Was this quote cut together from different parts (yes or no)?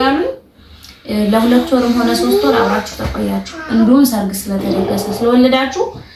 no